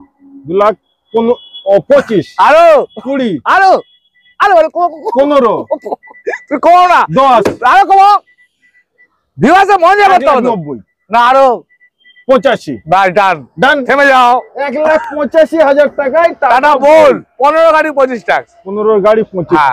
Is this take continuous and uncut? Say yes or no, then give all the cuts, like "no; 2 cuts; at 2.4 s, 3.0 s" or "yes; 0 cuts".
yes; 0 cuts